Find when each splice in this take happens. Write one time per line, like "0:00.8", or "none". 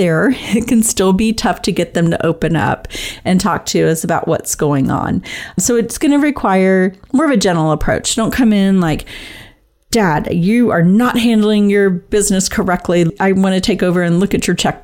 0:05.6
0:13.1